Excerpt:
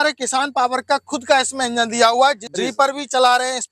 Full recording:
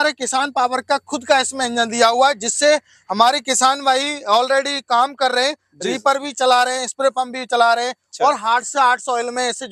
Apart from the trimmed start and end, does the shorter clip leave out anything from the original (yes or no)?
yes